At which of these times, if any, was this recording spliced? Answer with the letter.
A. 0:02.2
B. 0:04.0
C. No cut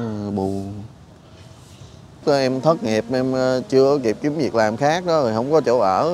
A